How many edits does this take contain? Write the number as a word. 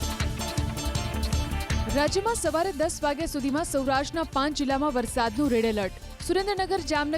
one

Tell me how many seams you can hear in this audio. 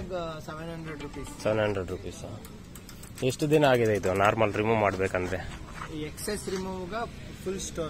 zero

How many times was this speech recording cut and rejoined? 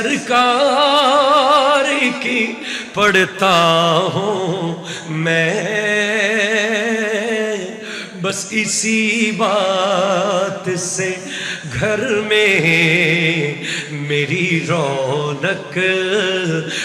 zero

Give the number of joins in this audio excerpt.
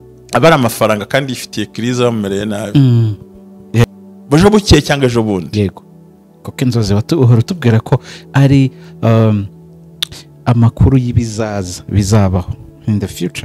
one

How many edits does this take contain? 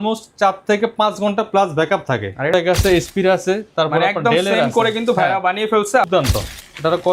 two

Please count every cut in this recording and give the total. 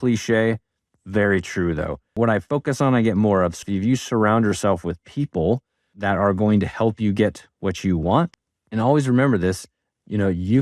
three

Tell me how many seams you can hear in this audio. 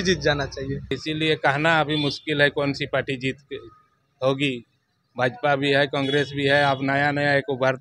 one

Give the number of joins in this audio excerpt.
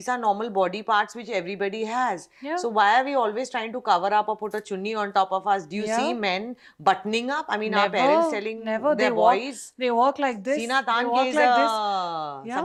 zero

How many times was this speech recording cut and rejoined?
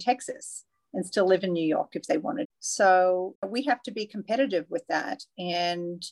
two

